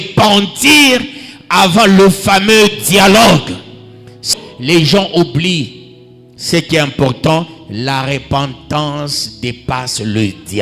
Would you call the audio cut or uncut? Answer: cut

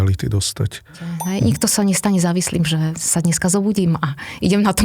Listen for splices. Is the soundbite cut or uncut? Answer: cut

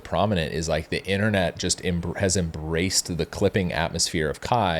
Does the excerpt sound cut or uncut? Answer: uncut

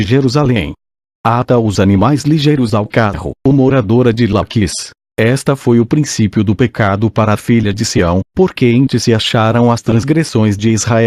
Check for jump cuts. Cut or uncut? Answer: uncut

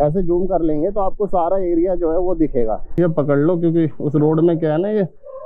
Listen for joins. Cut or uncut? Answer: cut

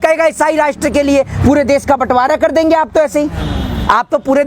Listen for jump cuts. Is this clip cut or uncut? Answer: uncut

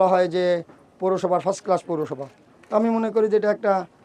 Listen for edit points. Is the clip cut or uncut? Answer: uncut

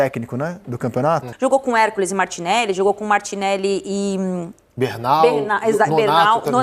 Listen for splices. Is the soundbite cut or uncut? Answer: cut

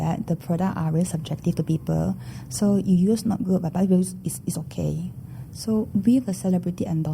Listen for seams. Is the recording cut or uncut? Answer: uncut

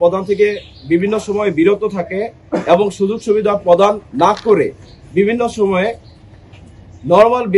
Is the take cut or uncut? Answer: uncut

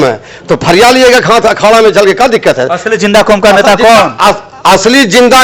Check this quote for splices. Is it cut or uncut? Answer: uncut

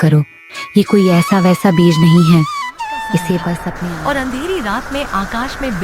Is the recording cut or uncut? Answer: cut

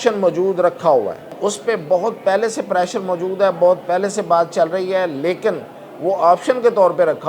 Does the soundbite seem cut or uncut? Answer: cut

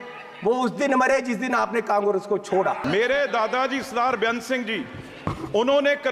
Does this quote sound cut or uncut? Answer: cut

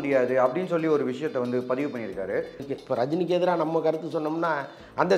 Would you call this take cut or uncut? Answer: cut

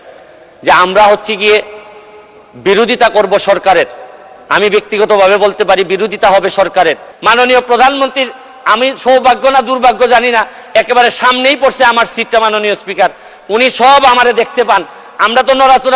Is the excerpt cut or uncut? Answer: cut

